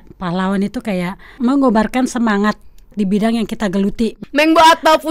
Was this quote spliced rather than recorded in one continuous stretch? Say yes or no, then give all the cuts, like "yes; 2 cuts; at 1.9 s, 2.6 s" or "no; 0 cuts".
yes; 3 cuts; at 1.3 s, 2.9 s, 4.2 s